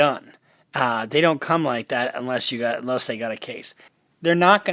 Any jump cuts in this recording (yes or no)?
no